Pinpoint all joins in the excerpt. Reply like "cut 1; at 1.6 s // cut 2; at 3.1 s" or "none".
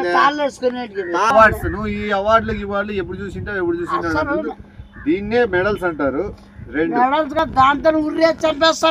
cut 1; at 1.3 s // cut 2; at 7.5 s